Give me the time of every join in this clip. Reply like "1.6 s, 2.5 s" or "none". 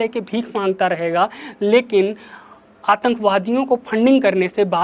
none